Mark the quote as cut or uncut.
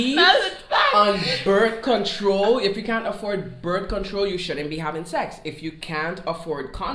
uncut